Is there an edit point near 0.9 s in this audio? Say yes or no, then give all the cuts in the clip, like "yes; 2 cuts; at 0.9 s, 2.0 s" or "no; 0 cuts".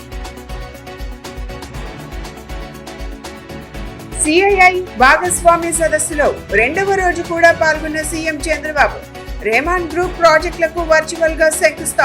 no; 0 cuts